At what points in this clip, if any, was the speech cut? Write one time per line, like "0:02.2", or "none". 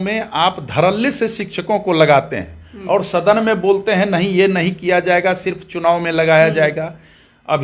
none